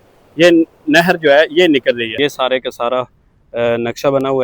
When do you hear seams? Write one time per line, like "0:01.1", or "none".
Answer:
0:02.1